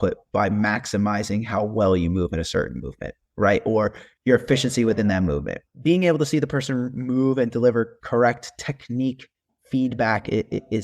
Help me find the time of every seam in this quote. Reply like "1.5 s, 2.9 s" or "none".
4.0 s, 5.5 s